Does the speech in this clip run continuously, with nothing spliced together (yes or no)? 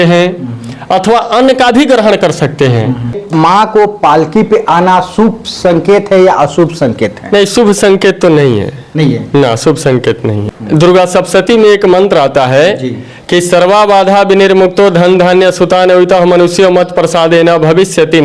no